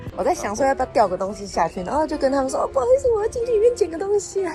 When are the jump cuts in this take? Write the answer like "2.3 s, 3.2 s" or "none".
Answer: none